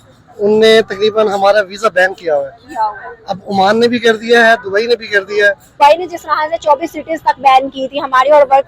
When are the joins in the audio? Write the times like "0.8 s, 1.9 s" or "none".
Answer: 5.8 s